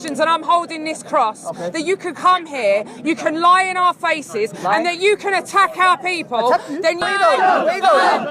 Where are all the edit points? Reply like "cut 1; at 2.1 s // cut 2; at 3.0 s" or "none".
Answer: cut 1; at 7.0 s

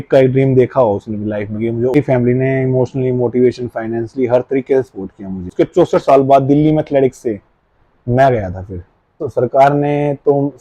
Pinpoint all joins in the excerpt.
cut 1; at 1.9 s // cut 2; at 5.5 s // cut 3; at 9.2 s

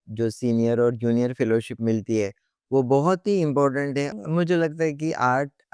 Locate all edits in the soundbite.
cut 1; at 4.1 s

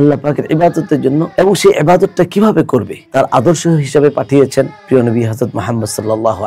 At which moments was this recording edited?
cut 1; at 1.3 s // cut 2; at 3.0 s

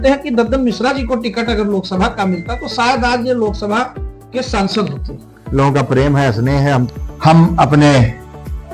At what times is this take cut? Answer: cut 1; at 6.9 s

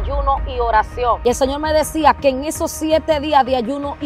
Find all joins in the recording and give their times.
cut 1; at 1.2 s

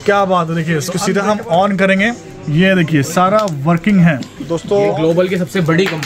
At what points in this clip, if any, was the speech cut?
cut 1; at 0.9 s // cut 2; at 4.6 s

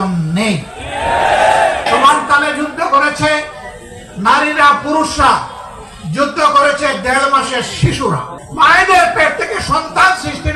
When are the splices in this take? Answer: cut 1; at 1.9 s // cut 2; at 8.4 s

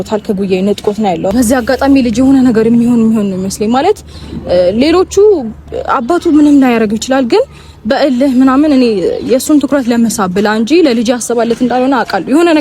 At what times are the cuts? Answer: cut 1; at 1.3 s

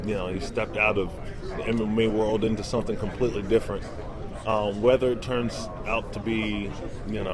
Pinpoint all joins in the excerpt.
cut 1; at 4.0 s

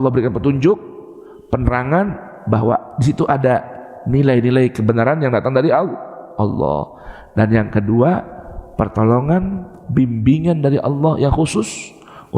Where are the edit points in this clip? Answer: none

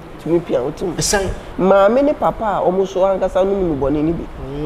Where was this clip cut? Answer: cut 1; at 1.5 s

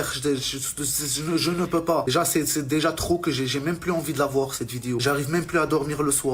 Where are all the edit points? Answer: cut 1; at 2.1 s // cut 2; at 5.0 s

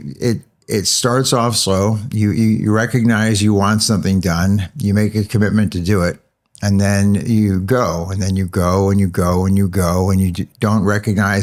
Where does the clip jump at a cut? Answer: none

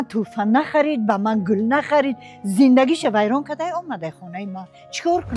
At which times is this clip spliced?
none

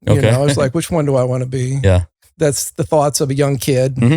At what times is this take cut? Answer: cut 1; at 2.3 s

